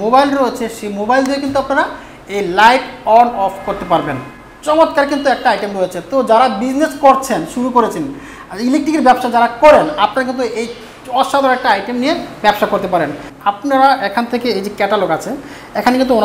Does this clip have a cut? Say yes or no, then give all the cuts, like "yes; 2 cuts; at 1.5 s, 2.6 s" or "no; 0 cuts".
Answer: yes; 1 cut; at 13.2 s